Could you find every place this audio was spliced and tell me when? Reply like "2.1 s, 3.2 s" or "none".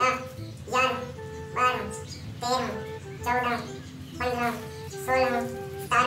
none